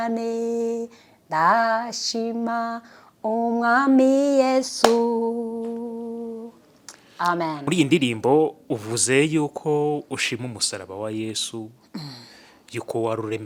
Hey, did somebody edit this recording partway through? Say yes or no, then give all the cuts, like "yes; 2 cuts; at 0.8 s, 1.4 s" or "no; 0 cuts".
no; 0 cuts